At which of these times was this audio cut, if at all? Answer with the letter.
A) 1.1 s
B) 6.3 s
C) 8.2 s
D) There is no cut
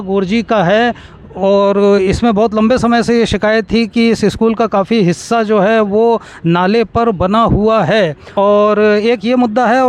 C